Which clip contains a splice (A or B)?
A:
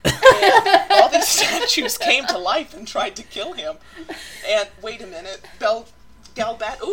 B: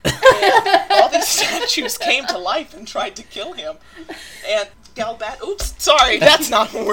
B